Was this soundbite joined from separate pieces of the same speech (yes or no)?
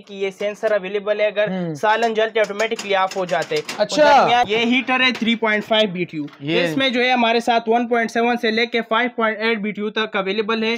yes